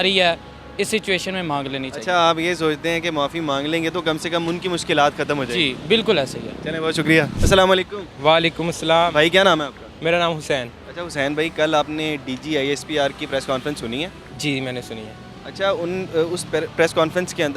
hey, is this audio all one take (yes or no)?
yes